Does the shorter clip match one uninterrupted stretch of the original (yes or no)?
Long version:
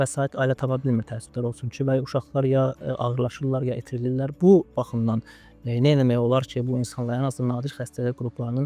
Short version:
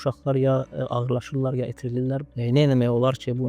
no